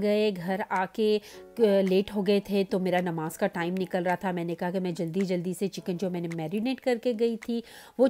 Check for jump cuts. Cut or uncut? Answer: uncut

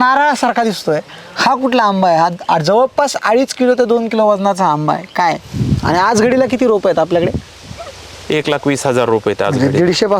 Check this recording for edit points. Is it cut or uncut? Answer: cut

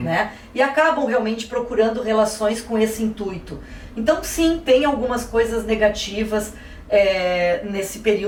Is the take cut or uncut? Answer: uncut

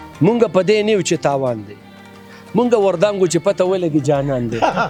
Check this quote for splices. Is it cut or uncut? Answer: uncut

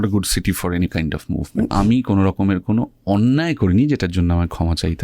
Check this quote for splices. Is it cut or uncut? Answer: cut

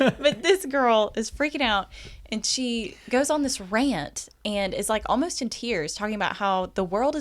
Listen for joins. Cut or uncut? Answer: uncut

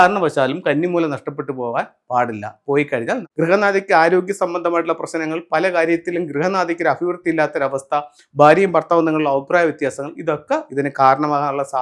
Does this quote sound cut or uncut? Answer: cut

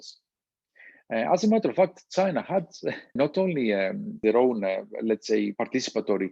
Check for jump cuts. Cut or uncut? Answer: cut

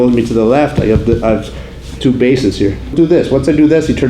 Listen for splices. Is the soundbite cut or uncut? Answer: cut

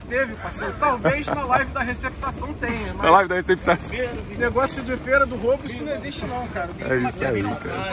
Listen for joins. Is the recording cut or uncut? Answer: uncut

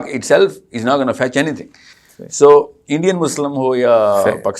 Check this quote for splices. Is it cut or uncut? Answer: uncut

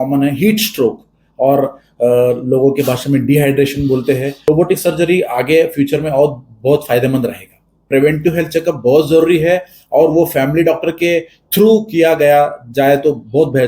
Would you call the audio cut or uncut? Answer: cut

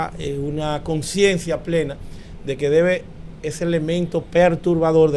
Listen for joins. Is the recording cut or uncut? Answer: uncut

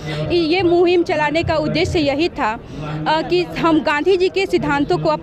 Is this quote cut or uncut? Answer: uncut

